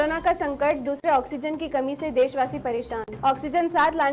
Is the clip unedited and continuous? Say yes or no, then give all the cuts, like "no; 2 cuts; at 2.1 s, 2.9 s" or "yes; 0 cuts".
yes; 0 cuts